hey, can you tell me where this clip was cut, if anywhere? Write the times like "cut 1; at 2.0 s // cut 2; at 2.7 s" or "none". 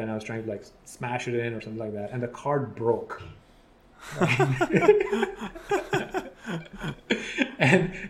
none